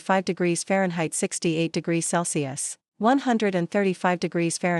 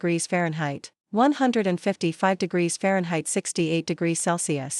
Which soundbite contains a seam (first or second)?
second